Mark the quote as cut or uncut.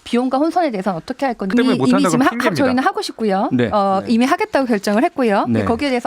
cut